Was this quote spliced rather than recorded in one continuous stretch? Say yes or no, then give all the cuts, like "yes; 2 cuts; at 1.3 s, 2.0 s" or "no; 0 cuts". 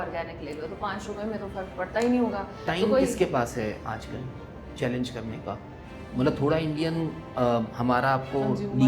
no; 0 cuts